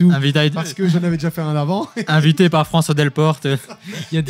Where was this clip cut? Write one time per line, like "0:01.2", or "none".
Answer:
none